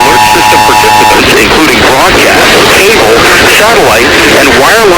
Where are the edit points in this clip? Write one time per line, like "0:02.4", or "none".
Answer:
none